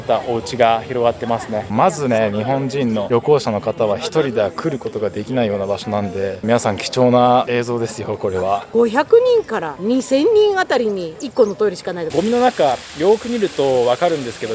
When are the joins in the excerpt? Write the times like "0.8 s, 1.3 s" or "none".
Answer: 1.7 s, 6.4 s, 8.7 s, 12.1 s